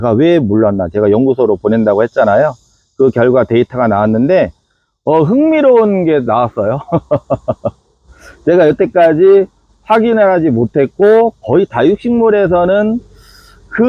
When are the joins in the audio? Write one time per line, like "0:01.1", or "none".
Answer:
none